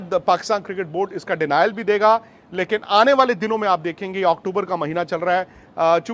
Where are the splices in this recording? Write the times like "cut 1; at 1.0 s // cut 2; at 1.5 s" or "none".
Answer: none